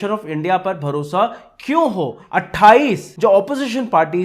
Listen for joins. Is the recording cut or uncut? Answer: cut